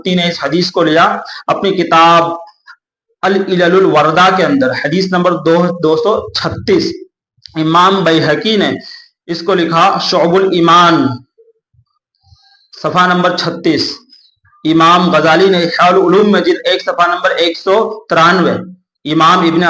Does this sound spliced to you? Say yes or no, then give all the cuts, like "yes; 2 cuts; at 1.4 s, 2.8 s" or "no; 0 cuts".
no; 0 cuts